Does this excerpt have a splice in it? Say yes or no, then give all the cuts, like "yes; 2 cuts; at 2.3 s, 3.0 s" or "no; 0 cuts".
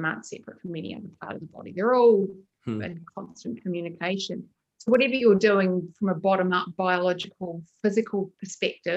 no; 0 cuts